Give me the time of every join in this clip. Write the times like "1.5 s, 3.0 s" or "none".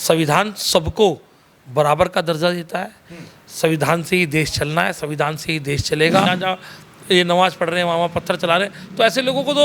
6.3 s

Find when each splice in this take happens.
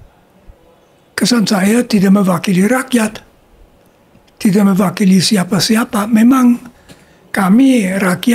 none

